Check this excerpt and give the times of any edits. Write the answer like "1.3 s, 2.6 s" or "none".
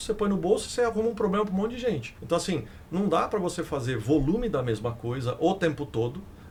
none